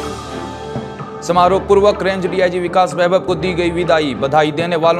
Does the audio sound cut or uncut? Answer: cut